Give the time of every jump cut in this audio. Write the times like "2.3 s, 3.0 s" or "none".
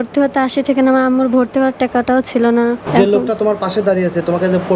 2.8 s